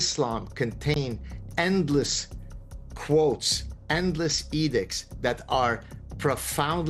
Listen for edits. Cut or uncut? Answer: uncut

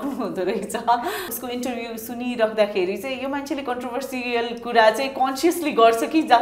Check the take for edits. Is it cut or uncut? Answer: cut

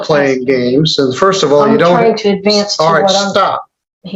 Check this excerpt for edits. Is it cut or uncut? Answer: uncut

